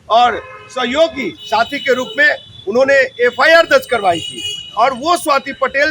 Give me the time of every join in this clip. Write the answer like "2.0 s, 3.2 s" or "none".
none